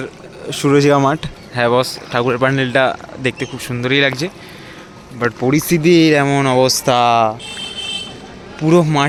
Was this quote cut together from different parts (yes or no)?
no